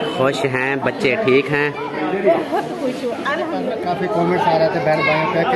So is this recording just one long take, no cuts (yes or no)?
no